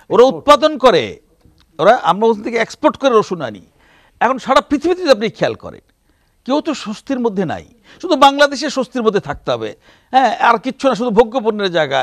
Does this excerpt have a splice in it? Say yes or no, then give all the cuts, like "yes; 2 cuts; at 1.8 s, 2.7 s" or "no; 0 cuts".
no; 0 cuts